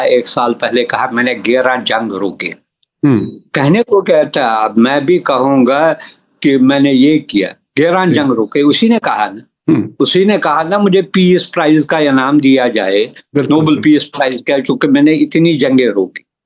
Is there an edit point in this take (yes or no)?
no